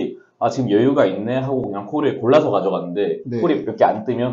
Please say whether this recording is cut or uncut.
uncut